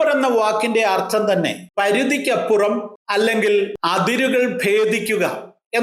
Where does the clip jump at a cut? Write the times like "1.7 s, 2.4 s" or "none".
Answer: 1.6 s, 3.0 s, 3.8 s